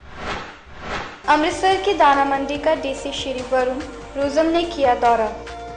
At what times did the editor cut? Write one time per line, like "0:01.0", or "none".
0:01.0